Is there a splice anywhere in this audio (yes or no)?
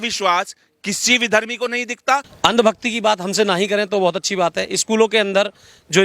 yes